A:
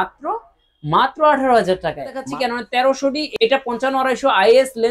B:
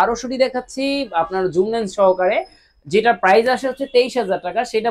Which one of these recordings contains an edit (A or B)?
A